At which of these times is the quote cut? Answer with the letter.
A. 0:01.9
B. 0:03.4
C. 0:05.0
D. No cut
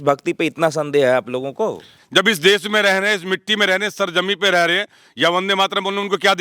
A